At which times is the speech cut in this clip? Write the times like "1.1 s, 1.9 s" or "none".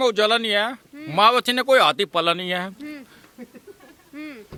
none

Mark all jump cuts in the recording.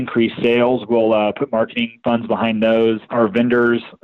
1.9 s, 3.1 s

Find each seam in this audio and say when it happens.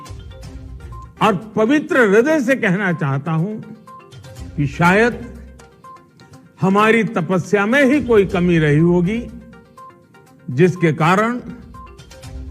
11.6 s

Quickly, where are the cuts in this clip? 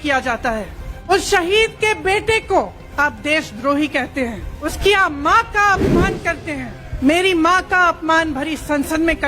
1.1 s, 2.8 s, 4.6 s, 6.8 s

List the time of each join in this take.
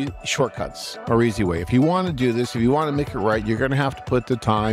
none

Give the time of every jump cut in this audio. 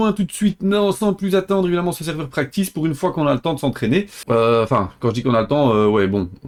none

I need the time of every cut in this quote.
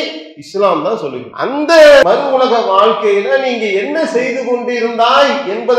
1.3 s, 2.0 s

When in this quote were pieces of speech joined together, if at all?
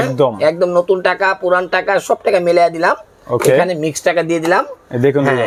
none

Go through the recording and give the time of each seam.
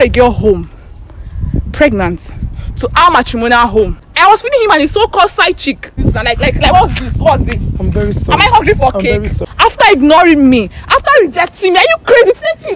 4.0 s, 6.0 s, 9.4 s

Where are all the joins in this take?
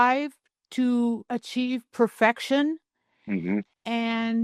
1.2 s

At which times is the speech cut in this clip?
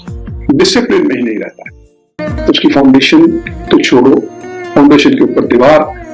2.1 s

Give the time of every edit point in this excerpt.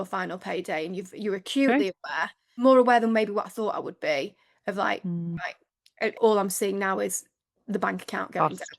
2.6 s, 6.0 s

